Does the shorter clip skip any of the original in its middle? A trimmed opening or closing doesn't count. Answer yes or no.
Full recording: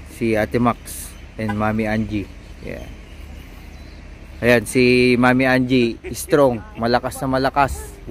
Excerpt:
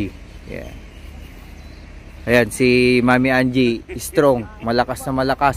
no